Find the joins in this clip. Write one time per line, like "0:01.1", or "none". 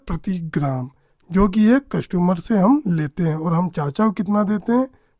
none